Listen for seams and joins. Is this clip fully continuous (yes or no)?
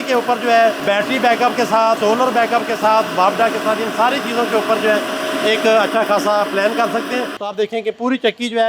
no